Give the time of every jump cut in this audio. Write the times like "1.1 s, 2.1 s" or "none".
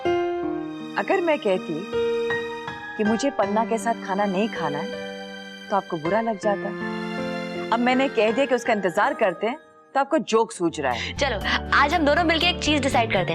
11.1 s